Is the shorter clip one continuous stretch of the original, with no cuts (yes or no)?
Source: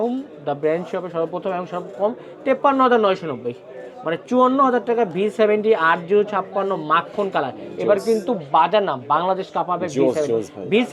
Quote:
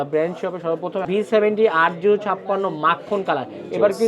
no